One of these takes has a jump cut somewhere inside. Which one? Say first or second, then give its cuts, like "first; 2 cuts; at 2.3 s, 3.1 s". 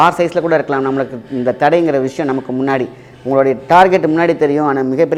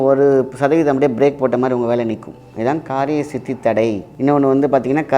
second; 1 cut; at 4.1 s